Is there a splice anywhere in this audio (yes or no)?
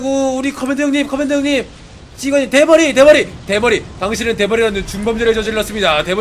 no